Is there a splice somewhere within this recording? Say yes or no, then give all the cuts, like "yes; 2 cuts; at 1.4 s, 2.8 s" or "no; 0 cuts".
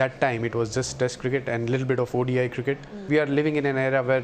yes; 1 cut; at 3.0 s